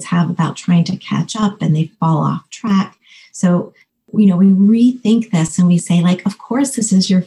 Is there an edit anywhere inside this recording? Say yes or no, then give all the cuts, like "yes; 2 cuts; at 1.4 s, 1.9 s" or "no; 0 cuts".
no; 0 cuts